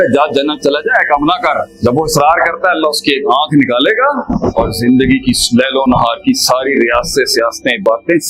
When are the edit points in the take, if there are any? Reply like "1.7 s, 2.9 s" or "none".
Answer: 1.7 s, 4.3 s